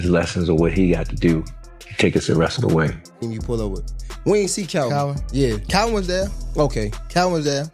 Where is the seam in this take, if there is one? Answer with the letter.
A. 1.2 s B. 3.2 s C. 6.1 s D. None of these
B